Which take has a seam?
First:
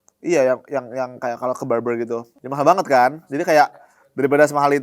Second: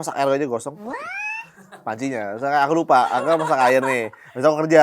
first; 1 cut; at 2.3 s

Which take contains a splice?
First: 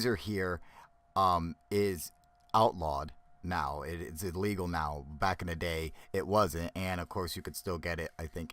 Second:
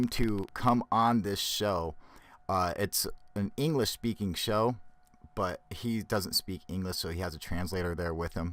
first; 1 cut; at 2.8 s

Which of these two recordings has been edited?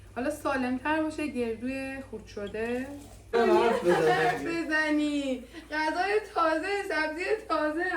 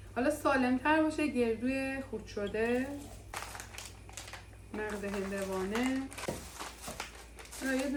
first; 1 cut; at 3.3 s

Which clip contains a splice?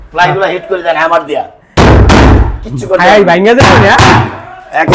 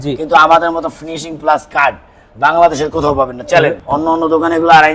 second; 1 cut; at 3.8 s

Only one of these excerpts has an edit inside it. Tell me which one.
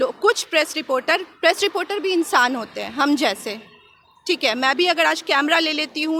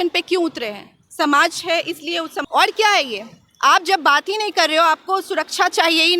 second; 1 cut; at 2.4 s

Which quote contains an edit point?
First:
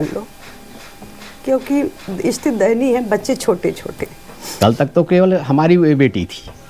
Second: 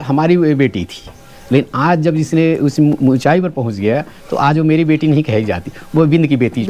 first; 1 cut; at 4.5 s

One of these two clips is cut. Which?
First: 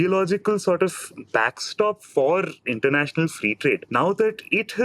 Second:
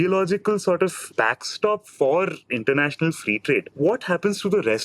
second; 2 cuts; at 1.0 s, 3.7 s

